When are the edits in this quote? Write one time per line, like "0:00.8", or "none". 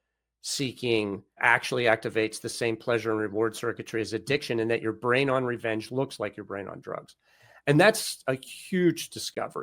0:01.2

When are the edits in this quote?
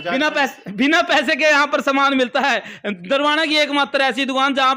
none

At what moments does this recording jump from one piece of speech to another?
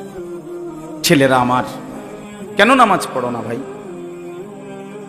0:01.0
0:03.6

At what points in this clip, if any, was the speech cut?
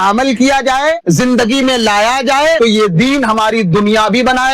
0:01.0
0:02.6

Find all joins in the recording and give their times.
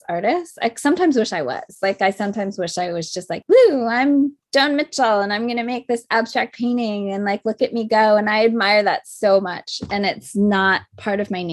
0:03.4

